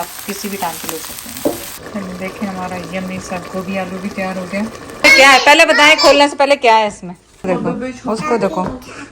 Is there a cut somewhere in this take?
yes; 3 cuts; at 1.9 s, 5.0 s, 7.4 s

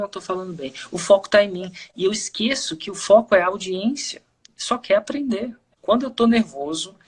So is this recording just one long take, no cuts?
no; 1 cut; at 5.7 s

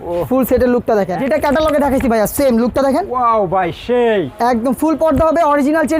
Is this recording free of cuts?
no; 1 cut; at 1.2 s

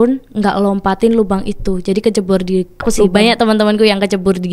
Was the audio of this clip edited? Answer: yes; 1 cut; at 3.0 s

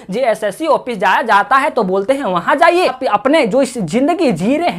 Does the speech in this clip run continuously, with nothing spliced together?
no; 1 cut; at 3.0 s

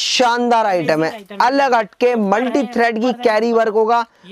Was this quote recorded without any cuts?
yes; 0 cuts

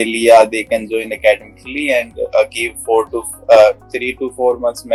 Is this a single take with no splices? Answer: yes; 0 cuts

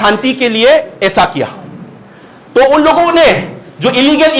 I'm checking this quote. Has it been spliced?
no; 0 cuts

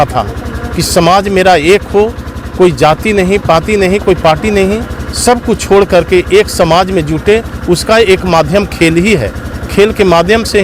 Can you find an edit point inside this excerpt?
no; 0 cuts

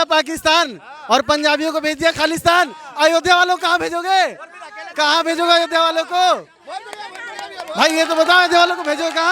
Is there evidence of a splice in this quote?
no; 0 cuts

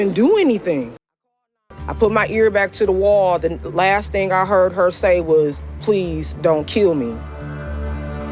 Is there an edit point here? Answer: yes; 1 cut; at 1.2 s

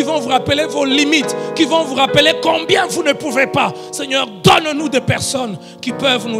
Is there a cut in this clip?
no; 0 cuts

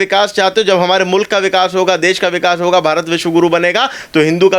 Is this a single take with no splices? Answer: yes; 0 cuts

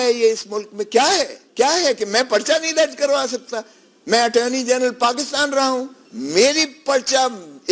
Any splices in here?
yes; 2 cuts; at 1.4 s, 6.0 s

